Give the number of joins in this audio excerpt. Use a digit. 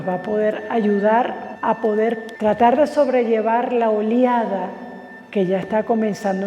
2